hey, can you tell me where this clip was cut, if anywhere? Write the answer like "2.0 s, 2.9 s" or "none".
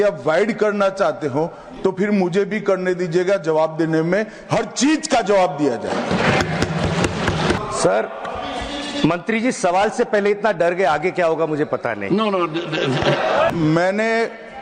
7.6 s, 13.5 s